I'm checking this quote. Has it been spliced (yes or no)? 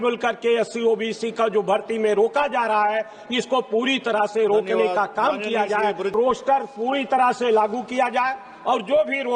yes